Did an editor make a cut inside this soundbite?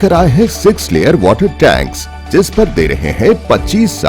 no; 0 cuts

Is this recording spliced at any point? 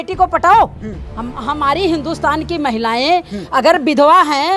no; 0 cuts

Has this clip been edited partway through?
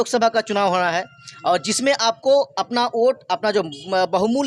no; 0 cuts

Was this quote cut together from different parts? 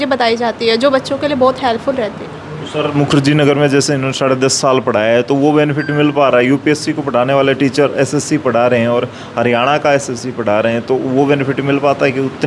no; 0 cuts

